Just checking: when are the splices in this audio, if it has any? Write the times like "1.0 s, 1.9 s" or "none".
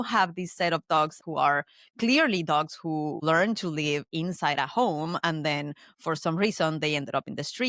1.1 s, 3.2 s